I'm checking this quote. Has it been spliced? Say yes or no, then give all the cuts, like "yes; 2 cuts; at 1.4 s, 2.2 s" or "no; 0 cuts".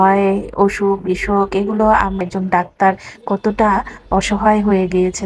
yes; 1 cut; at 2.2 s